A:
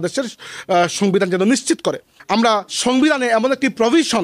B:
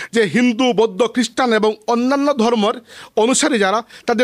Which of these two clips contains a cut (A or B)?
A